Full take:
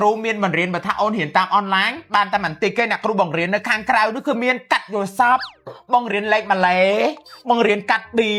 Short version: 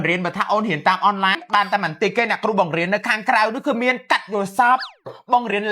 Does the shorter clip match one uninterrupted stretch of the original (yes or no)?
no